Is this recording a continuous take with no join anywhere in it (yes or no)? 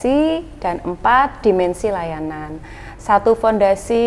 yes